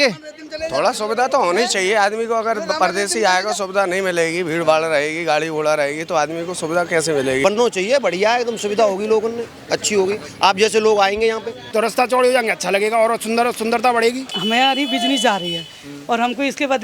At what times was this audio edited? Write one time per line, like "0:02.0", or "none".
0:07.4
0:11.5
0:14.3